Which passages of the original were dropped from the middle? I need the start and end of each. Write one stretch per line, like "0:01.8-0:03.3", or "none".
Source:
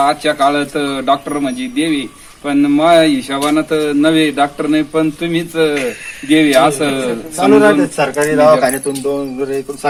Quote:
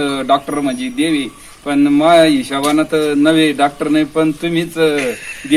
none

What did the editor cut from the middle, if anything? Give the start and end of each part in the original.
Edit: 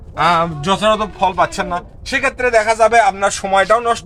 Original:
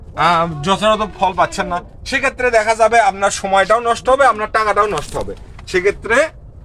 none

